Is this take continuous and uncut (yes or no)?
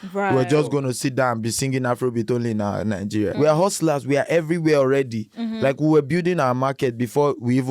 no